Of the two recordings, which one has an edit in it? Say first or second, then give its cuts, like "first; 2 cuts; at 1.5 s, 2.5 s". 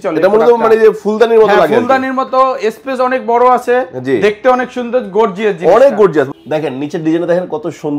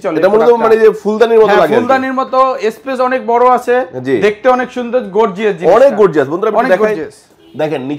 first; 1 cut; at 6.3 s